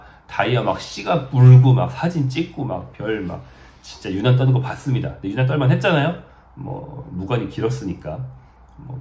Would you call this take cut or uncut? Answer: uncut